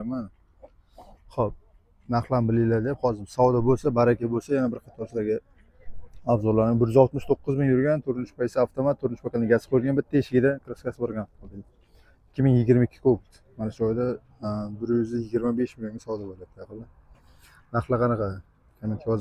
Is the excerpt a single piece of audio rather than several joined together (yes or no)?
yes